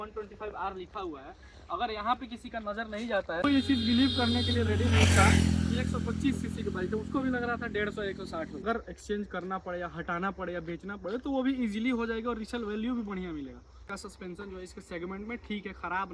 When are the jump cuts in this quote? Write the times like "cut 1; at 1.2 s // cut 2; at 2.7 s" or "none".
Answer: cut 1; at 3.6 s // cut 2; at 8.6 s // cut 3; at 13.8 s

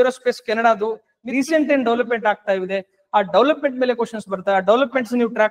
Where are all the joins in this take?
cut 1; at 1.1 s

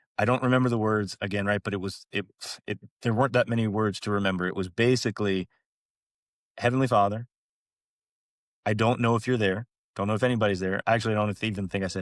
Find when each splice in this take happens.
none

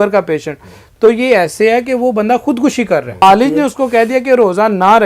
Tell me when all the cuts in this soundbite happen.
cut 1; at 3.2 s

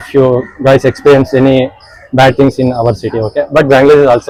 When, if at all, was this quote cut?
none

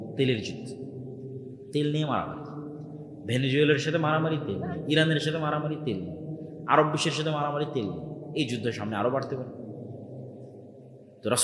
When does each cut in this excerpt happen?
none

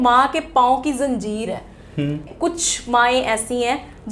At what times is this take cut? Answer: cut 1; at 2.3 s

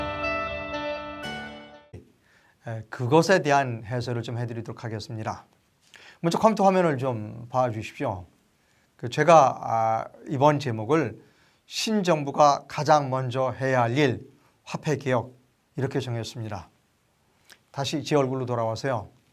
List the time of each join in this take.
none

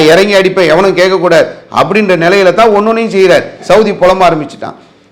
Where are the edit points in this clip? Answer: cut 1; at 3.6 s

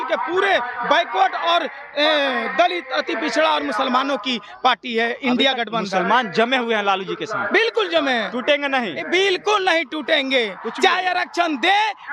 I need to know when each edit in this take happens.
none

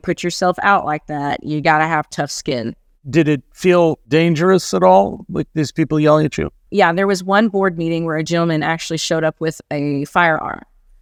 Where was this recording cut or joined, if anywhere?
none

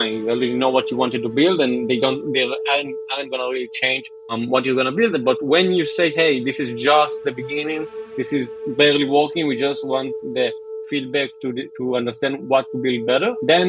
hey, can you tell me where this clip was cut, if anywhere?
cut 1; at 10.8 s

